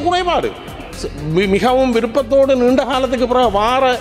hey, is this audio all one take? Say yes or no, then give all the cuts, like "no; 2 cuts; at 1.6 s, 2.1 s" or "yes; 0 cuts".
no; 1 cut; at 1.0 s